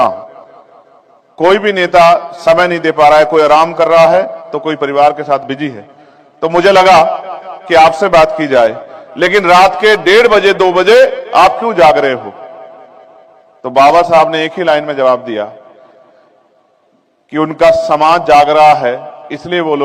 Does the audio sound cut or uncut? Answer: uncut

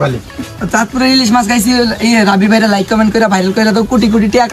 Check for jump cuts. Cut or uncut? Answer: uncut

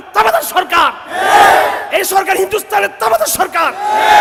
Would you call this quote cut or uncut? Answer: uncut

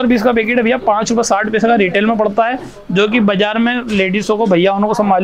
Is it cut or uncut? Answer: uncut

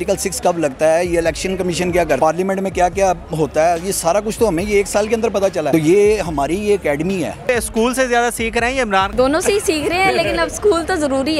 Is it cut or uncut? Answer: cut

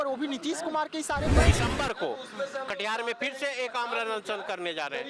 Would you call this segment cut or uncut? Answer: cut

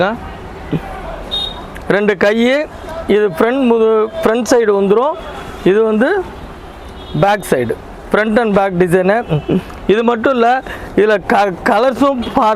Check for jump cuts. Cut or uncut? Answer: uncut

